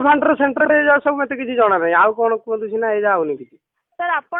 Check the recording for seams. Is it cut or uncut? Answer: uncut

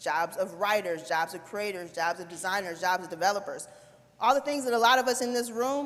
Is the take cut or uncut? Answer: uncut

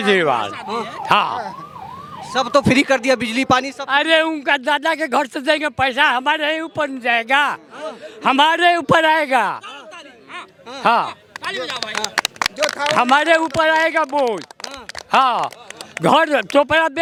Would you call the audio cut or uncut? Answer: uncut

